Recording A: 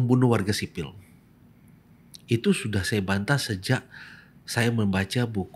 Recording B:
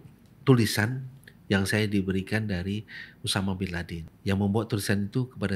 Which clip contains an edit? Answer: B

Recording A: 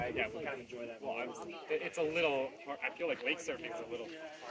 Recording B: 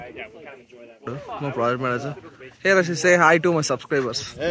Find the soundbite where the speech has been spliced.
B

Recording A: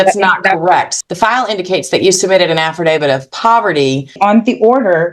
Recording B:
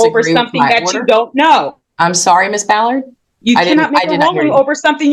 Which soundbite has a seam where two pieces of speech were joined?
A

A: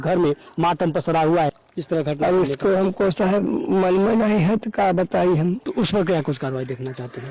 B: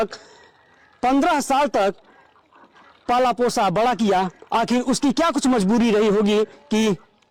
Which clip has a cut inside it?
A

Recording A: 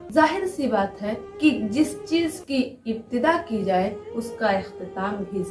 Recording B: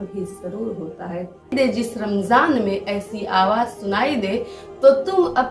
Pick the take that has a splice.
B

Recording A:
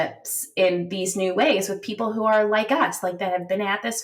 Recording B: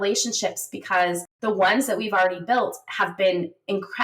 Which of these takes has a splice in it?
B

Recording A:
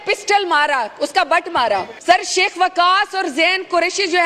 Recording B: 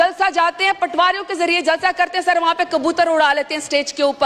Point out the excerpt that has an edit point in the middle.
A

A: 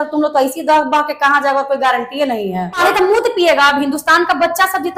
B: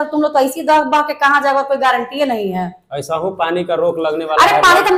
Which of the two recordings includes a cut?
A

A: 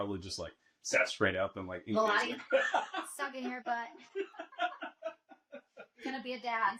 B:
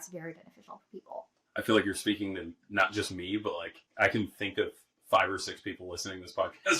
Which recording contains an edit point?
B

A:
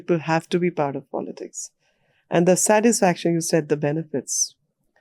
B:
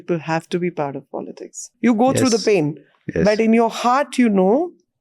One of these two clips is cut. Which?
B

